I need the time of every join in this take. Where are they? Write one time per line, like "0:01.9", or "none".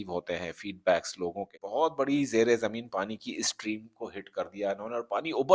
0:01.6